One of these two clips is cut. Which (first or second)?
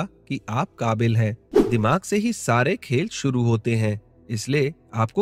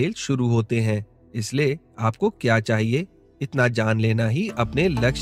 first